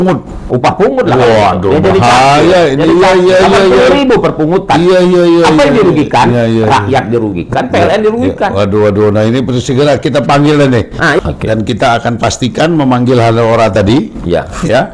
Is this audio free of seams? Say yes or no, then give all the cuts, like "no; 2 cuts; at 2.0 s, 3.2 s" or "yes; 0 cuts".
no; 1 cut; at 11.2 s